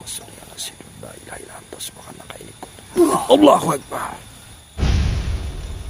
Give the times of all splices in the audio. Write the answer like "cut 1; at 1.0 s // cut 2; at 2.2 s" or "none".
none